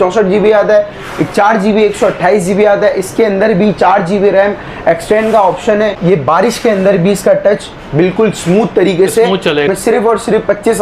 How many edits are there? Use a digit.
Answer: 2